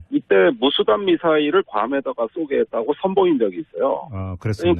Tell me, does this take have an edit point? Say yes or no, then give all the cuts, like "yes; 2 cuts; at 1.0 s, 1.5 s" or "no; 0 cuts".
yes; 1 cut; at 2.7 s